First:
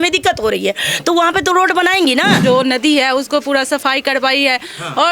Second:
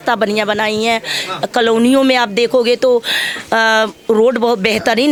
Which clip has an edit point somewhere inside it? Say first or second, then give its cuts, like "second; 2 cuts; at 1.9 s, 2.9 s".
first; 1 cut; at 2.4 s